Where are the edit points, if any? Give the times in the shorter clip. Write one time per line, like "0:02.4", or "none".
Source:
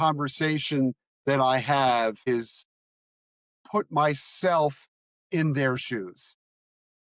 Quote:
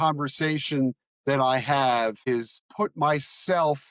0:02.5